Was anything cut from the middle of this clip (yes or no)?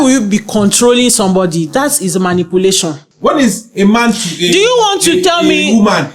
yes